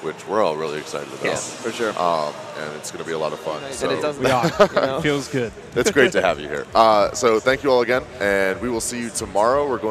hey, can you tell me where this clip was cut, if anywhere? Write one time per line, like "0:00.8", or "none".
0:04.1

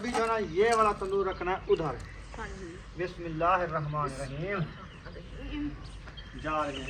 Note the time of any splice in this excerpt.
none

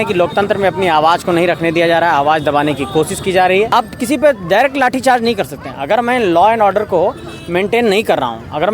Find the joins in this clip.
0:03.7

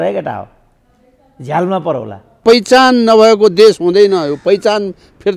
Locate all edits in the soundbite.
0:02.4

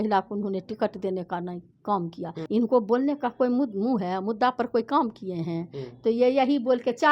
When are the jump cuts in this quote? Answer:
0:02.4

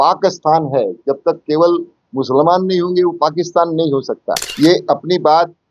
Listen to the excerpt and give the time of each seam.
0:04.5

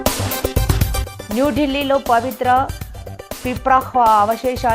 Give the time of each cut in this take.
none

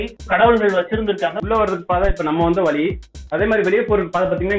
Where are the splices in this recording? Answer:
0:01.4

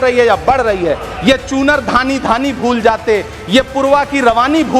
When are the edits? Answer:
0:01.1

